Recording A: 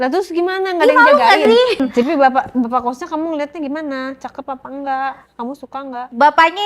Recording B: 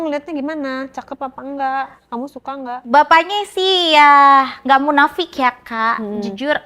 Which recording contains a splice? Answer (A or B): A